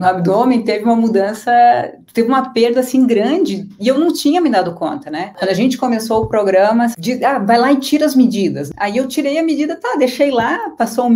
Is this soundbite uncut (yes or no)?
no